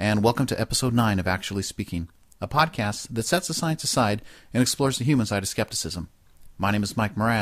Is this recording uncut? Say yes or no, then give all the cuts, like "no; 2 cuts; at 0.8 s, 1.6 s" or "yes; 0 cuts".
no; 1 cut; at 4.2 s